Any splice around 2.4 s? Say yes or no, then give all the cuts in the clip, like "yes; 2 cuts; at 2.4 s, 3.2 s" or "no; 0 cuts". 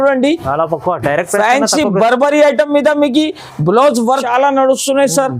no; 1 cut; at 4.2 s